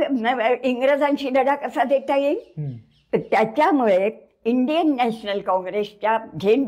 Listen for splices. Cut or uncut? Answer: uncut